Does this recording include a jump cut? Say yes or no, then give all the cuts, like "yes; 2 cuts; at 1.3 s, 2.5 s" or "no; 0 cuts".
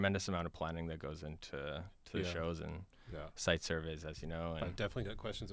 no; 0 cuts